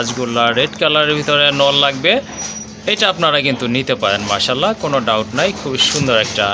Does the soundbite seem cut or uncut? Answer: uncut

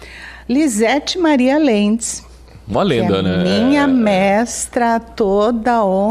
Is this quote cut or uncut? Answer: uncut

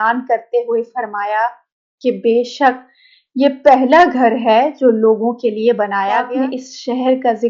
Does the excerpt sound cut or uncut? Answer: cut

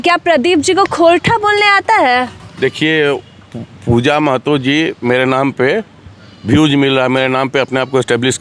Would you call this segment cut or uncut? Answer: uncut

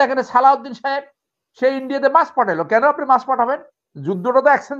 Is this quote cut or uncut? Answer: uncut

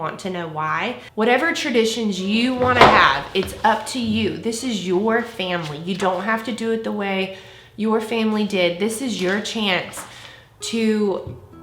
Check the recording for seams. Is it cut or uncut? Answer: cut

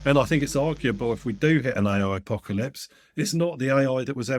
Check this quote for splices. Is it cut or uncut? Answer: uncut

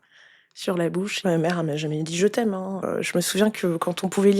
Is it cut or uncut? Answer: cut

